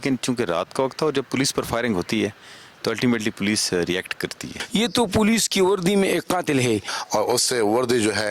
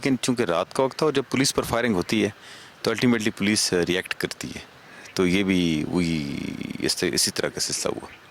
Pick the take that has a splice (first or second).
first